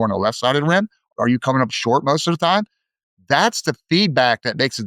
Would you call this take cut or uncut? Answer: cut